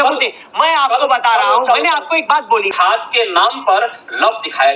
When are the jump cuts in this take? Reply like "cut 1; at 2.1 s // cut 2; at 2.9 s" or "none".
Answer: cut 1; at 2.7 s